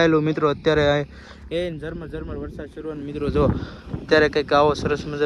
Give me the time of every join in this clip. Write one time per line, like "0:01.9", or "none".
none

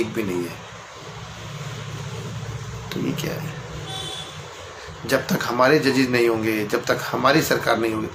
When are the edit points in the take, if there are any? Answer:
none

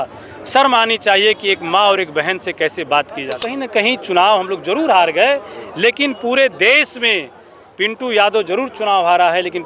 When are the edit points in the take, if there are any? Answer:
0:03.4

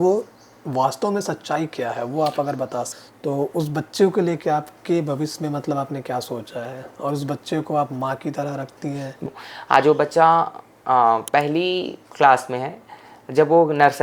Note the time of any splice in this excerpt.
0:02.9
0:09.2

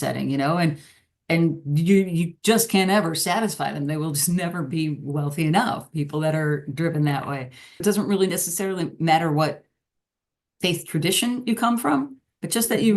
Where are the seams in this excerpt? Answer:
0:07.8

